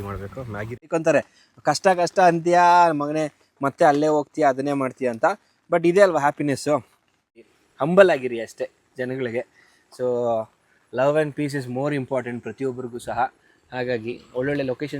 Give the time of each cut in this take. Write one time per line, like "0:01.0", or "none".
0:00.9
0:07.4

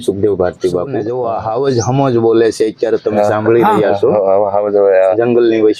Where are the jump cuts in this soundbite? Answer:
0:01.1

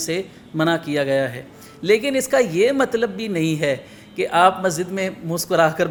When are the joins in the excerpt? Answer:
none

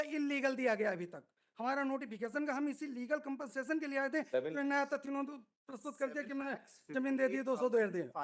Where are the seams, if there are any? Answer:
none

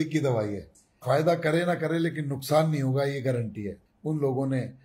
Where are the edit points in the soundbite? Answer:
0:03.8

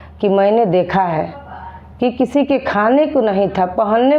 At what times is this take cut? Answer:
none

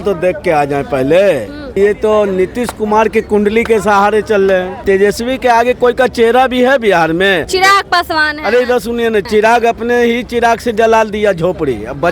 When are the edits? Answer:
0:01.8
0:04.8
0:07.5
0:09.3

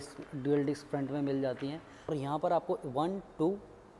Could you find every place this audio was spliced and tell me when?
0:02.1

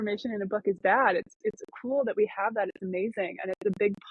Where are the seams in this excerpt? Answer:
none

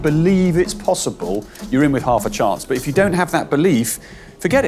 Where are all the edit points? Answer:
none

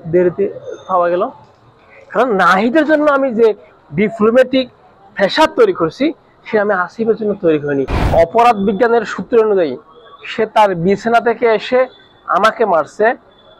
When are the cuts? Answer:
0:08.0

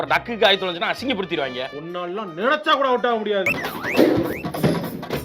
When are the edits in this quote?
0:03.5

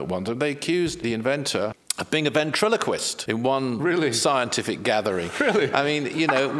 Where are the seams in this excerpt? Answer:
0:01.3
0:03.2

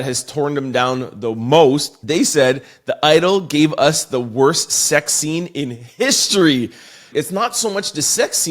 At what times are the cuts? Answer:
0:07.1

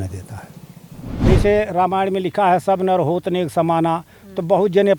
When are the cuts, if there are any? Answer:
0:01.1

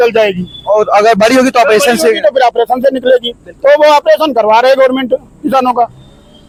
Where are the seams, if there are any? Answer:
none

